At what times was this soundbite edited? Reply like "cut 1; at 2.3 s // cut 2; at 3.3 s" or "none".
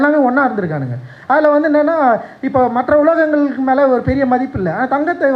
none